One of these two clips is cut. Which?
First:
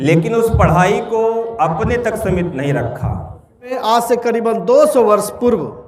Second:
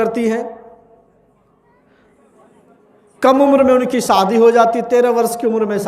first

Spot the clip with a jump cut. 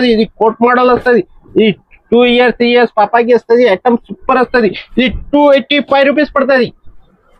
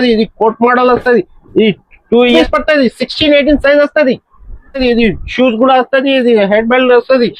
second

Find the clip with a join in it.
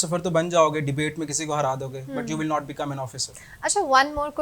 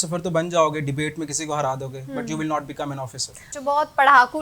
second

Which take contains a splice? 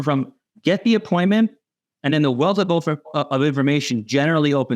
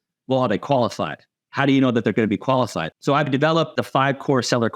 second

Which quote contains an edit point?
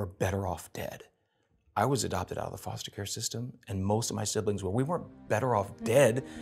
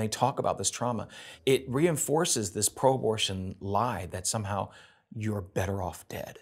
second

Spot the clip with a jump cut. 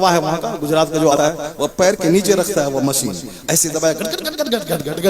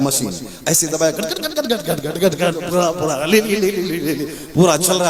first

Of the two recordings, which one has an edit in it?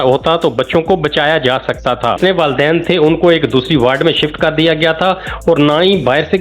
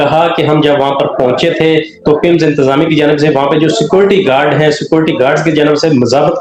first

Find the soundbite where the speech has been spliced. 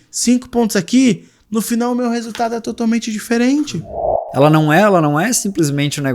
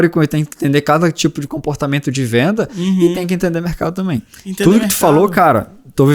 first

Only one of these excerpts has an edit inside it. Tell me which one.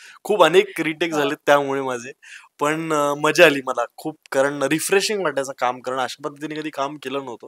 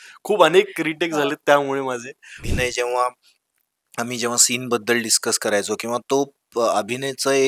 second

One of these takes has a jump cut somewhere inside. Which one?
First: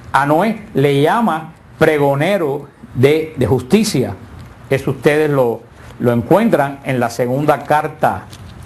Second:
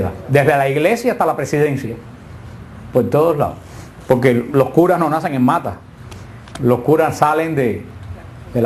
second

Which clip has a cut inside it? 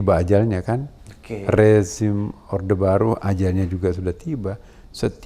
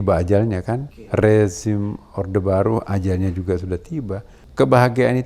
second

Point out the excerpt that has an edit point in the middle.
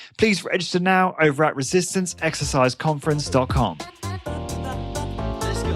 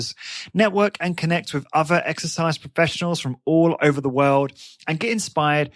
first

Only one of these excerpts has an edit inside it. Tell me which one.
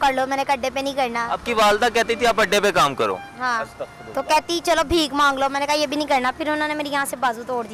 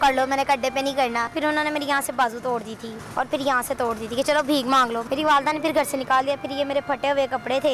second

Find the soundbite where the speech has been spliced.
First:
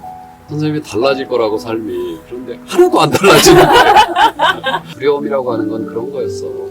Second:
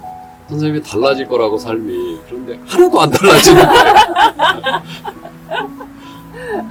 first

